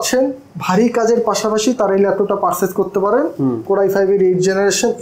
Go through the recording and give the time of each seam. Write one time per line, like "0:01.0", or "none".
none

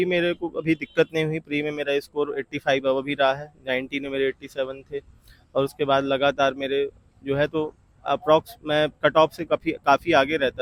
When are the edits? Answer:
none

